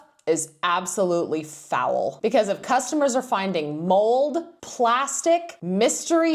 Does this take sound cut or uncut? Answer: cut